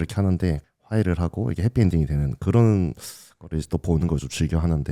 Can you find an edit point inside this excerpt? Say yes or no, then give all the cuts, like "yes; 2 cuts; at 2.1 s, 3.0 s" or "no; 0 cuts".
no; 0 cuts